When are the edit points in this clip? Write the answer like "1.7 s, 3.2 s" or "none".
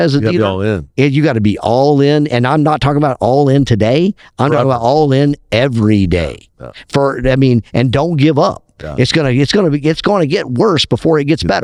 none